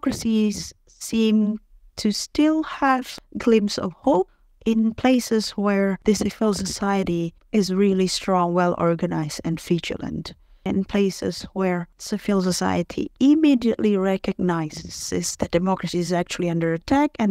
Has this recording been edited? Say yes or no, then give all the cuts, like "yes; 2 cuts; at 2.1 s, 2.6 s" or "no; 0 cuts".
yes; 5 cuts; at 3.1 s, 4.4 s, 6.0 s, 10.7 s, 11.9 s